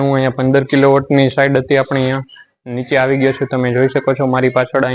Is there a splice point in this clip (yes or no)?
no